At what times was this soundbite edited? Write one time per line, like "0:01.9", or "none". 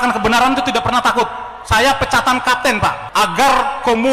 0:03.0